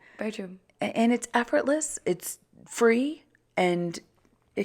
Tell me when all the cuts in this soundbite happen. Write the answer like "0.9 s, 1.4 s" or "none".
none